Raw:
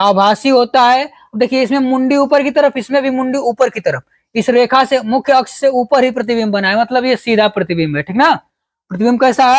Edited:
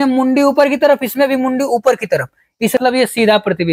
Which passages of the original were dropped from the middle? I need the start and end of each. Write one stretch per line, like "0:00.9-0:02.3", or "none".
0:04.5-0:06.9